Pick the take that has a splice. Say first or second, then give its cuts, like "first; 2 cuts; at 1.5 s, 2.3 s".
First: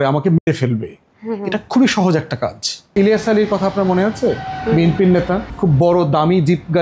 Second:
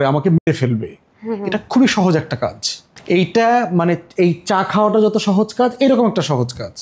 first; 1 cut; at 2.9 s